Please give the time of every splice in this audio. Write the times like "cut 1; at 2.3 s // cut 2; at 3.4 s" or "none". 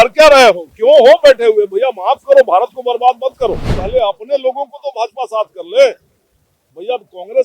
cut 1; at 3.7 s